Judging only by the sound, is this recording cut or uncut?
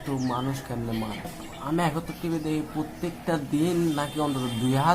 cut